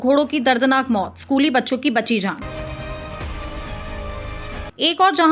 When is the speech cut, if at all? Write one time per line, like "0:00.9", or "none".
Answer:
none